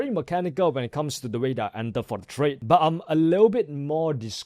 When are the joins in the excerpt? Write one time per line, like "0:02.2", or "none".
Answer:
0:02.6